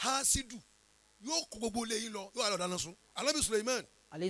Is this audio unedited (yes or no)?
no